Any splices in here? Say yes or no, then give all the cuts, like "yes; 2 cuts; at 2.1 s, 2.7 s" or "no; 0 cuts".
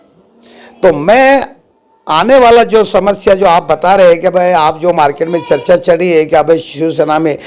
no; 0 cuts